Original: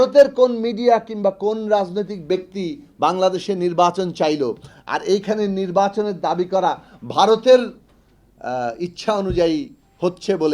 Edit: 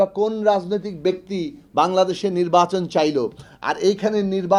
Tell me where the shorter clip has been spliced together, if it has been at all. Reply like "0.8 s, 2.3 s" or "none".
none